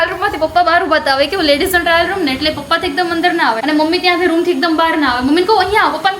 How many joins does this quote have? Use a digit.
1